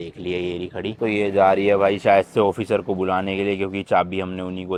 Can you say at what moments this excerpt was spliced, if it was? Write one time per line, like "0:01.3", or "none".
none